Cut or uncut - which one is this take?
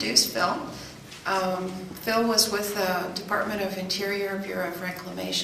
uncut